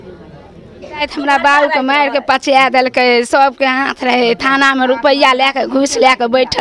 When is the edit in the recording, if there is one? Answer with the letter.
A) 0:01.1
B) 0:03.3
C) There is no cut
A